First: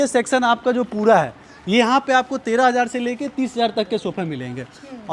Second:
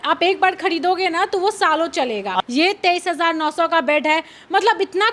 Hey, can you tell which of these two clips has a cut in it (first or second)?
second